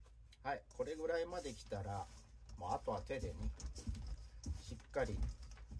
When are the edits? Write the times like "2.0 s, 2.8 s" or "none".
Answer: none